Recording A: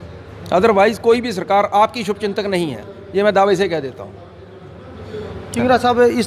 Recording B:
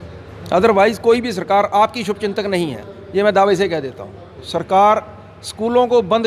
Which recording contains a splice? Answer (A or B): B